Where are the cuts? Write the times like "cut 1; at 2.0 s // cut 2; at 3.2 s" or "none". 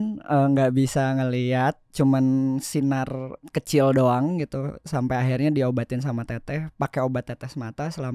cut 1; at 3.4 s